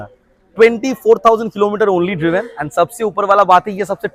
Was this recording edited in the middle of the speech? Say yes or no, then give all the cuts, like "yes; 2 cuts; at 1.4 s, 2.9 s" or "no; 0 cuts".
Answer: no; 0 cuts